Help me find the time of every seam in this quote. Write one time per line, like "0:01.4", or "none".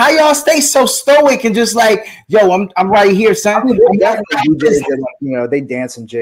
none